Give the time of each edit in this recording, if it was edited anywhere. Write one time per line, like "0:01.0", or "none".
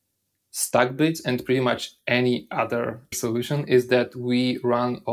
0:03.1